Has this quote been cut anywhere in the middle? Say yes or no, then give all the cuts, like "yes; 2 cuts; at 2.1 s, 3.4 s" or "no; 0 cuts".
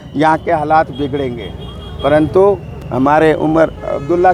no; 0 cuts